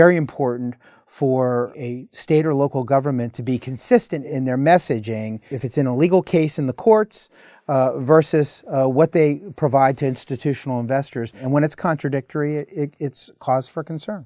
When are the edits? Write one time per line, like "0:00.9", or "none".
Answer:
0:01.8
0:04.2
0:05.5
0:11.4